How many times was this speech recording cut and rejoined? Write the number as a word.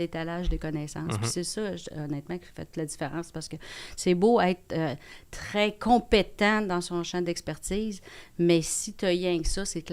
zero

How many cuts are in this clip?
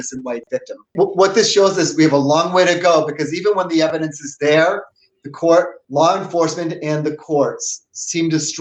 one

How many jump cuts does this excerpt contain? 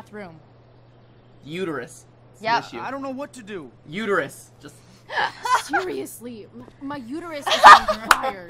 zero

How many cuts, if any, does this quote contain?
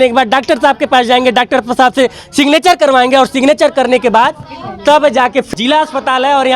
one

